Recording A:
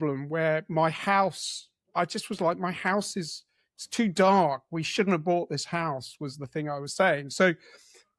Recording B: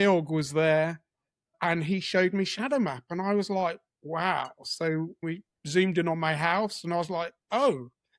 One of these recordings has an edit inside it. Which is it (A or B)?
B